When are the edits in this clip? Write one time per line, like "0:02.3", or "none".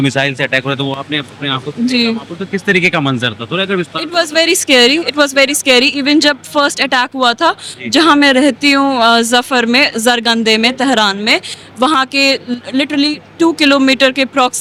none